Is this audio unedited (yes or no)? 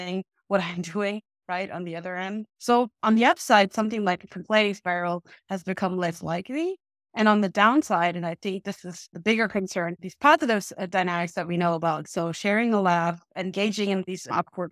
no